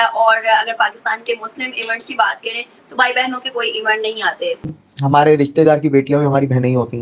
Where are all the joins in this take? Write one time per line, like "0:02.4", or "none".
0:04.6

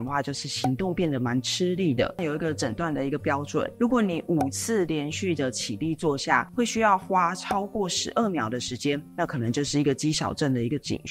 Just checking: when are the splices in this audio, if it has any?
0:02.1

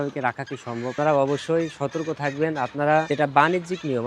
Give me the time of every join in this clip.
0:00.9
0:03.1

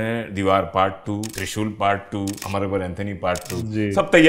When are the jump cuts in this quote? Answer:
0:01.4
0:02.4

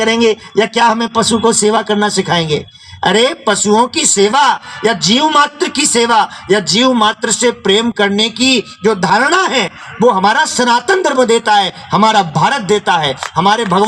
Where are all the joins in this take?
none

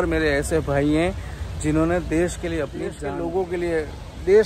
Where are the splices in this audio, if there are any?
0:02.9

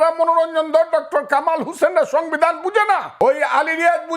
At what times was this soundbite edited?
0:03.1

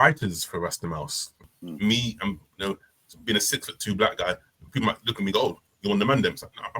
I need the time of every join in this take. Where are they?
0:01.5

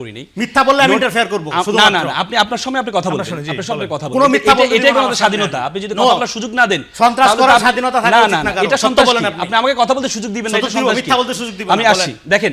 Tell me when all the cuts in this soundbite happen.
none

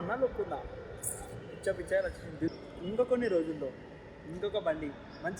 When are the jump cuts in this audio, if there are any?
0:02.5

